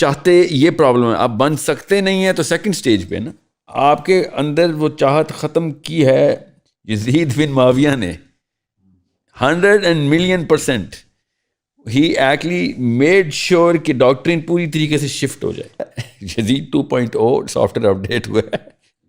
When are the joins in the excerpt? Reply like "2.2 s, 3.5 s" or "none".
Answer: 15.9 s